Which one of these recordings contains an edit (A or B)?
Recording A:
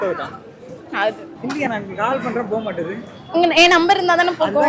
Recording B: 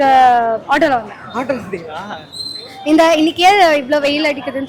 A